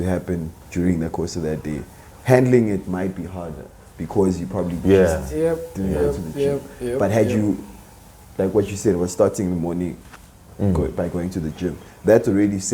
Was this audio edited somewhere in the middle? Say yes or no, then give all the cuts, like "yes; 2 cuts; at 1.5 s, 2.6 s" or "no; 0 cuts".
no; 0 cuts